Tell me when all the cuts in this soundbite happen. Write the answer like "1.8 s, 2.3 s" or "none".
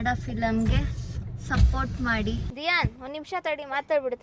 2.5 s